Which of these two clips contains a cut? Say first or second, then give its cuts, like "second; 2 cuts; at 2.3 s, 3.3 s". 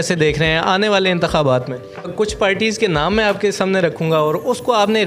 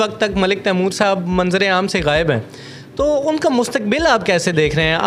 first; 1 cut; at 2.1 s